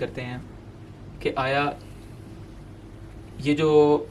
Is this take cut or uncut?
uncut